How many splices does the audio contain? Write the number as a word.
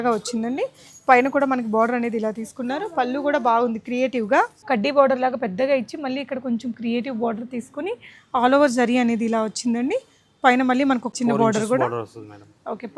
two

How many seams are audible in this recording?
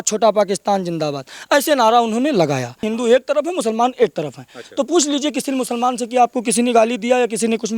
one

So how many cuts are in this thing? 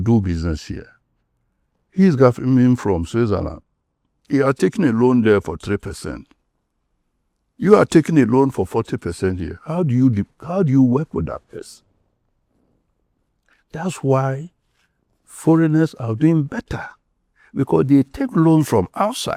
zero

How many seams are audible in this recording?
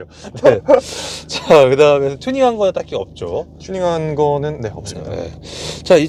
zero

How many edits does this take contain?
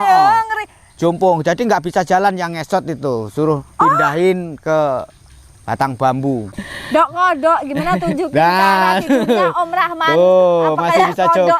one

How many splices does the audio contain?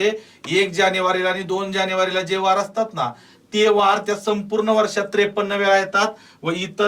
zero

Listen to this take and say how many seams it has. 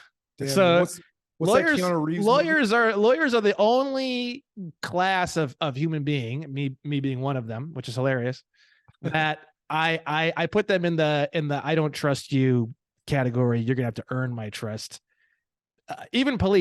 zero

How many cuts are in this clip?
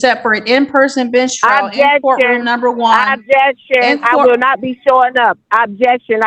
zero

